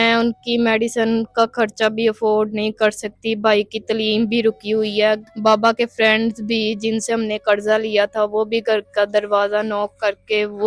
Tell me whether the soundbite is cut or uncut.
uncut